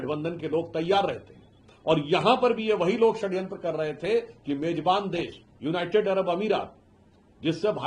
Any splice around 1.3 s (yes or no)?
no